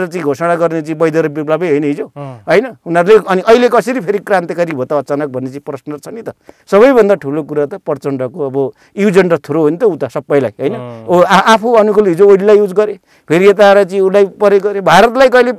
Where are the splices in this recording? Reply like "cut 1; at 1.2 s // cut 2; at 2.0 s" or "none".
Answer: cut 1; at 6.5 s